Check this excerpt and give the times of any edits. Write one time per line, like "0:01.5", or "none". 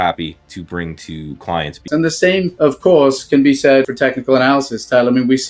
0:02.0
0:03.9

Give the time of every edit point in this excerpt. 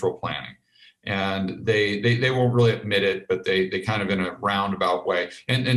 none

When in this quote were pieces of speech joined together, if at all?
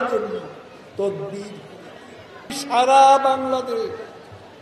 0:02.6

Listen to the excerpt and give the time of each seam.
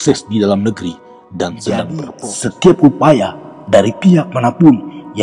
0:02.1

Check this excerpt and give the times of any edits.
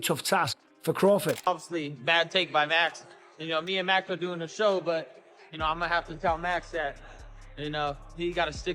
0:01.4

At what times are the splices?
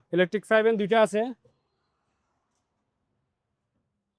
none

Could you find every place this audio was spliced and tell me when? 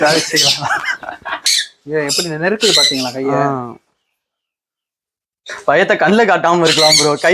0:01.4

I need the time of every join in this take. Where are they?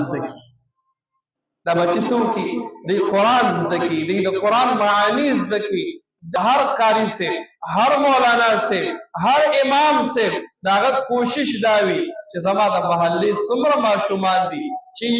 0:06.3

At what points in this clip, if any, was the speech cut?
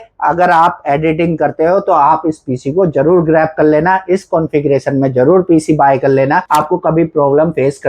0:06.4

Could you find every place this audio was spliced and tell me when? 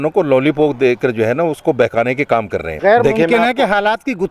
0:02.7

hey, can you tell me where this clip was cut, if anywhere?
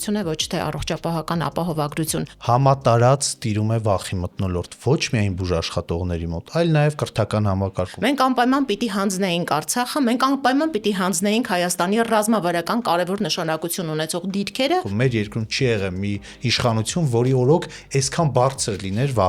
0:02.2
0:07.9
0:14.9

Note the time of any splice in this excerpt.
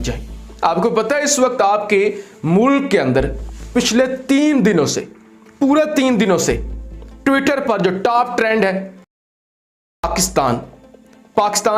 none

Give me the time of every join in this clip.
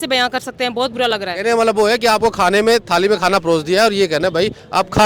0:01.3

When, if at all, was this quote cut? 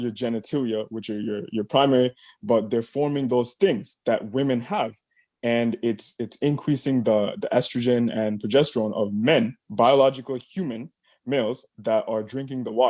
none

